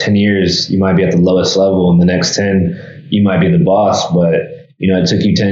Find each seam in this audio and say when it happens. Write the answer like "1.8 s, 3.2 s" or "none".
none